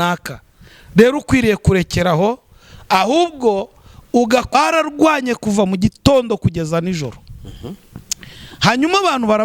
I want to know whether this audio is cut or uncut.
cut